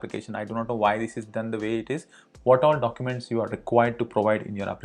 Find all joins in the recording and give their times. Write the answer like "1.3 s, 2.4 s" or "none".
2.2 s